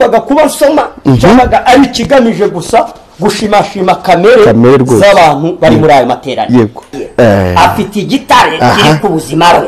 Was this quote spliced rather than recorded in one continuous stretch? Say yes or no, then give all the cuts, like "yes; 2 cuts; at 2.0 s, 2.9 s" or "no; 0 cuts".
yes; 1 cut; at 6.9 s